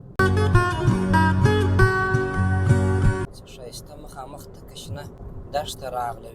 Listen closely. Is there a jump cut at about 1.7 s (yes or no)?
no